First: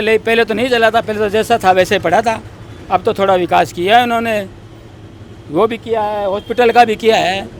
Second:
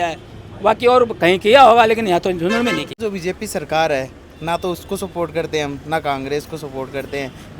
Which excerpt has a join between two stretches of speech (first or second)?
second